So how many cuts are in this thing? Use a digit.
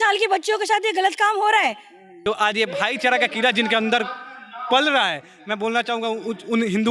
1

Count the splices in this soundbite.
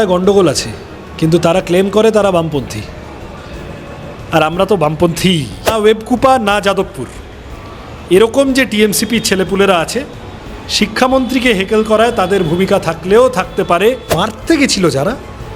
2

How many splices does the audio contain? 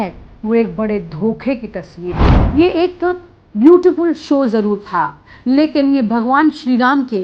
1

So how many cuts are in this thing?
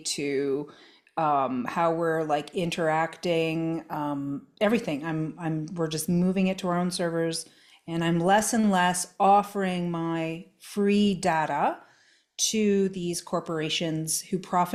0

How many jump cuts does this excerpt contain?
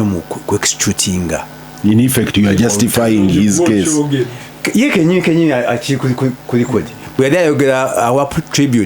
0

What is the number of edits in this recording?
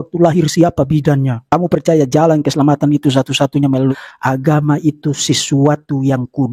1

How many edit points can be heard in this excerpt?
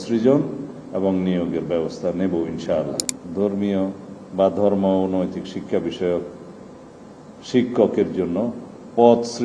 1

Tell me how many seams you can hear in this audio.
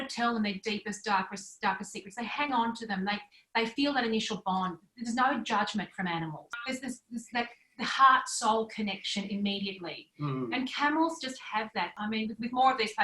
1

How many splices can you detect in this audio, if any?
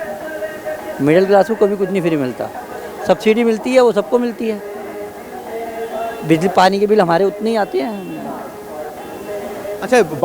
0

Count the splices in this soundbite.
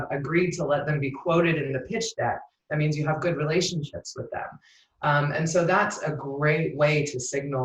0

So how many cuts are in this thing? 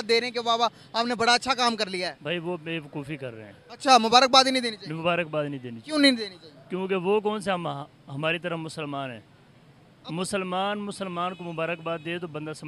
0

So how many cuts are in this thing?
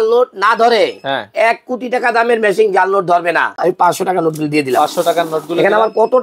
1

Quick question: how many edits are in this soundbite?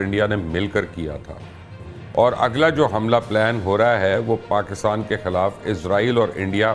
0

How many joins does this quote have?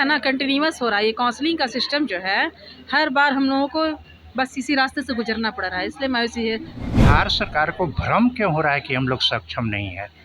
1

